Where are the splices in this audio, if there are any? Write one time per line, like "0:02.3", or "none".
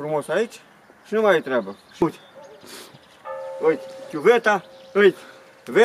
0:02.0